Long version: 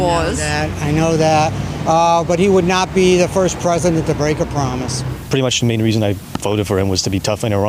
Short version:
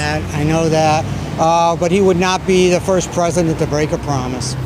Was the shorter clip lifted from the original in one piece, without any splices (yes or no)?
yes